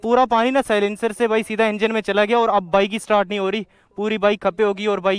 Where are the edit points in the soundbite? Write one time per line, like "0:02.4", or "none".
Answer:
none